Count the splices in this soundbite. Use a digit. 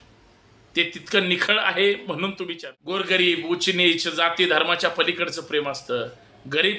1